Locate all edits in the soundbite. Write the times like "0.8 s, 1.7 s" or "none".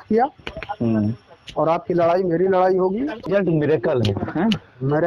3.3 s